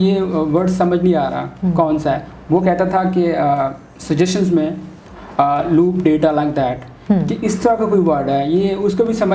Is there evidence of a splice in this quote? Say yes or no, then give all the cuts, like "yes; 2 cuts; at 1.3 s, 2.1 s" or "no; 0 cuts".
no; 0 cuts